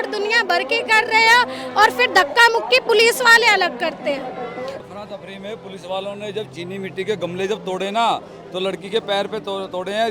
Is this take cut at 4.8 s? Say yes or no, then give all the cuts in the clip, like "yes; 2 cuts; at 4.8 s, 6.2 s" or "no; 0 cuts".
yes; 1 cut; at 4.8 s